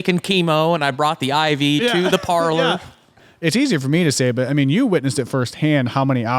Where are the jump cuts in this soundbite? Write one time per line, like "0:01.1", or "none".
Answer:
0:03.2